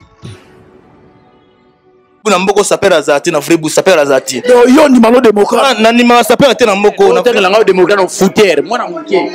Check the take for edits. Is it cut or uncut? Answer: cut